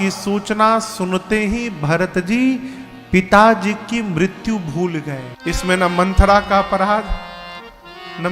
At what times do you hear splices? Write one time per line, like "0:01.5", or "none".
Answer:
0:05.3

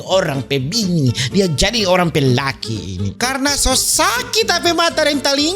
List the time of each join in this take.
0:03.1

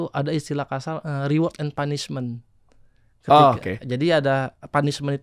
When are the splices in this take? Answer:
none

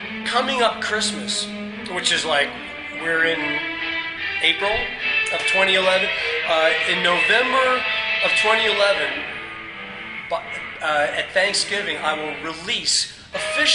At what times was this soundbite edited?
none

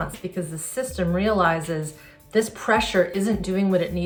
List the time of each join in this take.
none

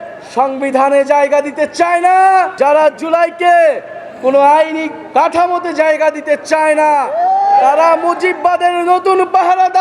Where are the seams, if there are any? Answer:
0:02.5
0:07.1

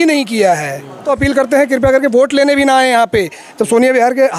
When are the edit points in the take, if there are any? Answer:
0:01.0

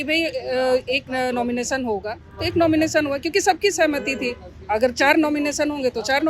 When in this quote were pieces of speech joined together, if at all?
none

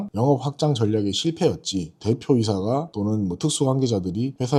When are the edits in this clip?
none

